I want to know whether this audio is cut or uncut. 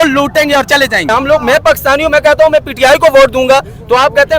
cut